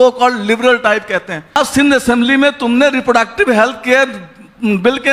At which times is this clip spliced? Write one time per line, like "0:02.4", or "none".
0:01.6